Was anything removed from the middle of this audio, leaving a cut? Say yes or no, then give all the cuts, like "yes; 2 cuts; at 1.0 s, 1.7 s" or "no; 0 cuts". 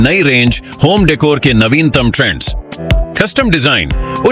yes; 1 cut; at 2.8 s